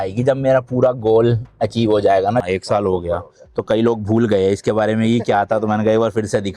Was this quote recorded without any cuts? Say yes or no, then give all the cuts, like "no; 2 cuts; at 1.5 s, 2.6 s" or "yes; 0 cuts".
no; 1 cut; at 2.4 s